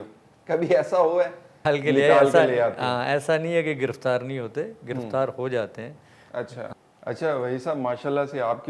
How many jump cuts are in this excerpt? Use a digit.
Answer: 2